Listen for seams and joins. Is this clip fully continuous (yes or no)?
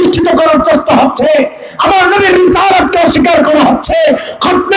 yes